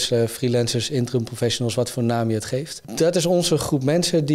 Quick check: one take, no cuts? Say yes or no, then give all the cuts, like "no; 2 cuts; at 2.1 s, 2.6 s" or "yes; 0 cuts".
no; 1 cut; at 2.8 s